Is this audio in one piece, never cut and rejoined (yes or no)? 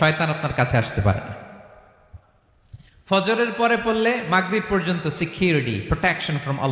yes